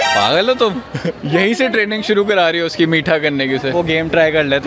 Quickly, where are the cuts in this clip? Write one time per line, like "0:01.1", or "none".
0:01.2
0:03.7